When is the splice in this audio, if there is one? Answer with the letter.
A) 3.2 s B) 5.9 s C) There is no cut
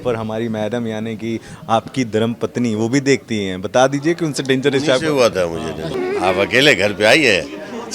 B